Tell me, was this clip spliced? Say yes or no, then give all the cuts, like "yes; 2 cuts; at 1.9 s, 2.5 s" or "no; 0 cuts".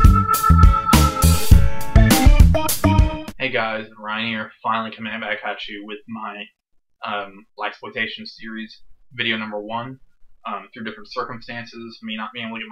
no; 0 cuts